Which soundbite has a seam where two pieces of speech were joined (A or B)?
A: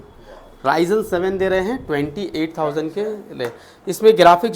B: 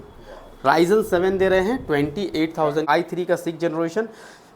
B